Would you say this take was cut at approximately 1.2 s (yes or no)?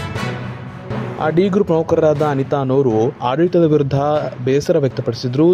yes